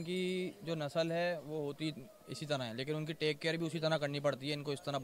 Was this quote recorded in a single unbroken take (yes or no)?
yes